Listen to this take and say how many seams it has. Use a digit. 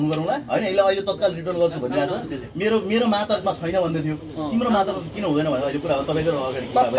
0